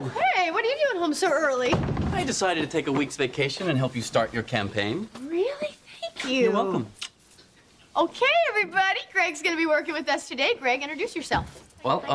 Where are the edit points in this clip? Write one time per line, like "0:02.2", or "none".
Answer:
0:04.6

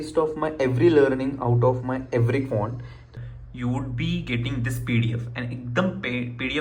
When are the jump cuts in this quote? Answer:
0:03.1

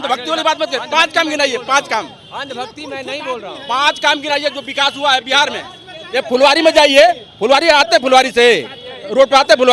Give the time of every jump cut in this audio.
none

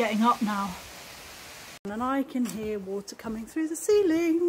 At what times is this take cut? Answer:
0:01.9

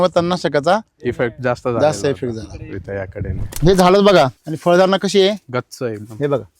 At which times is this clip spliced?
0:03.5
0:04.4

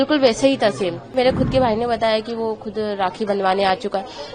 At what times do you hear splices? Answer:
0:01.1

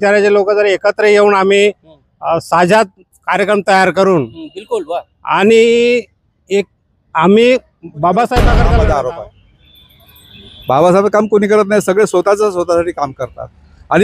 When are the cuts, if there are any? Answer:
0:08.6

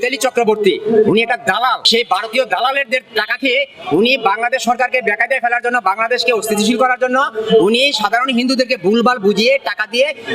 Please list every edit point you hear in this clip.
0:01.8

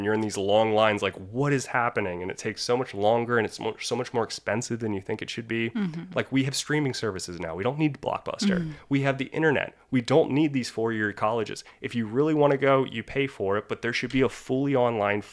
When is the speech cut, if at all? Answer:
none

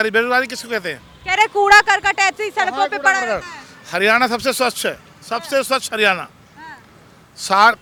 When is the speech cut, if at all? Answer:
none

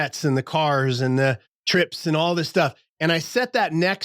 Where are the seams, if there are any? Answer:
0:01.5

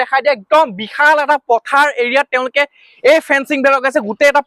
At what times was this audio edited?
none

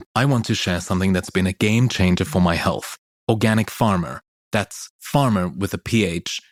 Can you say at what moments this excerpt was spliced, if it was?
none

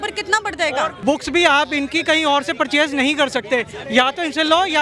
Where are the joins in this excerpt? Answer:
0:01.0

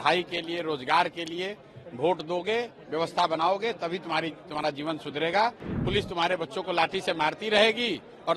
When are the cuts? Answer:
0:05.7

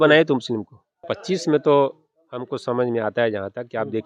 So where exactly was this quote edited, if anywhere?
0:01.1

